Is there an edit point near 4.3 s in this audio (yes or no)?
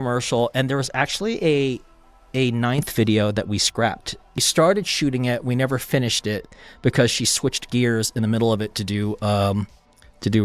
no